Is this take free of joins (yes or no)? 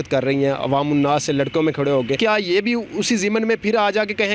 no